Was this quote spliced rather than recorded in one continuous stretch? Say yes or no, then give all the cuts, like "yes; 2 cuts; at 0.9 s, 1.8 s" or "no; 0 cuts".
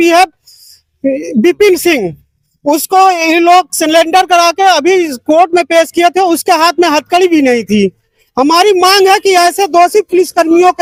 no; 0 cuts